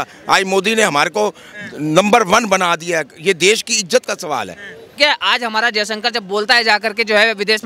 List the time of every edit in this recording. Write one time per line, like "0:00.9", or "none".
0:05.0